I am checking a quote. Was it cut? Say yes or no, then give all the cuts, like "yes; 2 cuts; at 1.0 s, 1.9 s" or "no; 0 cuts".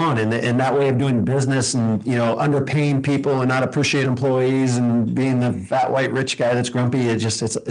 no; 0 cuts